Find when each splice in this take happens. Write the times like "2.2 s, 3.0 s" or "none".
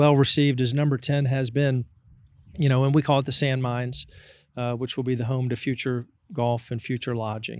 none